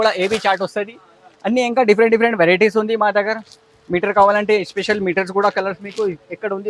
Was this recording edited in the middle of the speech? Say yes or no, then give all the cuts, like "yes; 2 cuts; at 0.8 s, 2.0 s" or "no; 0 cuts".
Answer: no; 0 cuts